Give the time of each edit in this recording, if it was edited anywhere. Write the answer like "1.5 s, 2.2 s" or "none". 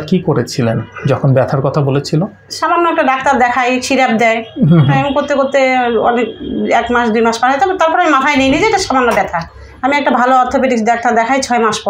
none